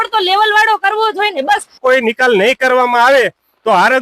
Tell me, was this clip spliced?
yes; 1 cut; at 1.8 s

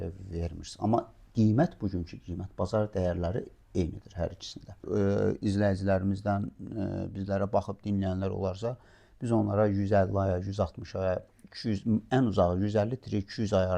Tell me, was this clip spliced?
yes; 1 cut; at 4.8 s

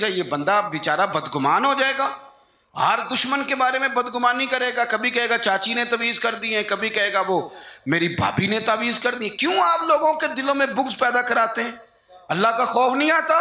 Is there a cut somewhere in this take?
no; 0 cuts

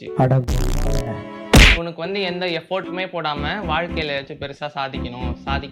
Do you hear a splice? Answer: yes; 1 cut; at 1.8 s

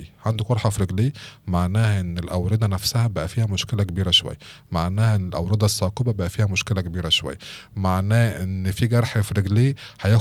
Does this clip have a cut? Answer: no; 0 cuts

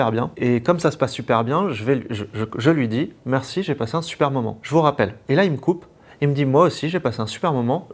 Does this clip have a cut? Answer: no; 0 cuts

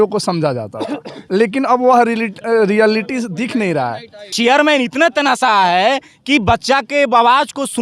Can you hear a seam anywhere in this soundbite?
yes; 1 cut; at 4.3 s

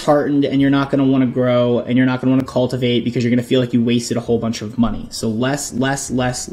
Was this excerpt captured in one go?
yes; 0 cuts

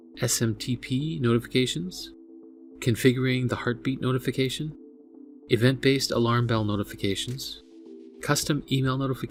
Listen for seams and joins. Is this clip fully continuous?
yes; 0 cuts

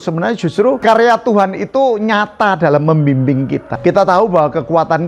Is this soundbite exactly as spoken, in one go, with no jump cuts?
no; 2 cuts; at 0.8 s, 3.7 s

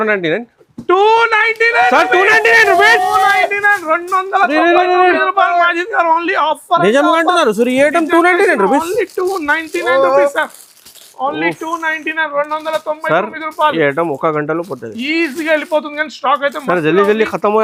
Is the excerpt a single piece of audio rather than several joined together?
yes; 0 cuts

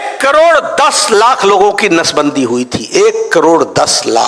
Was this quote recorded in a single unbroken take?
yes; 0 cuts

